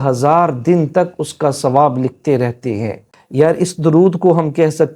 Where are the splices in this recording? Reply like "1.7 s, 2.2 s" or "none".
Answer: 3.2 s